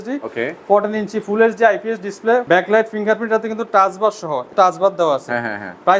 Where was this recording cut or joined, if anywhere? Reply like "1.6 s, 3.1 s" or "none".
2.4 s, 4.5 s